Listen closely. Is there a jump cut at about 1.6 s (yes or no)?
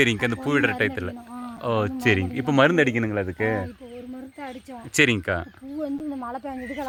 no